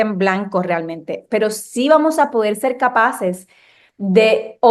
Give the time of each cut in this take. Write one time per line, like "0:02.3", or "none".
none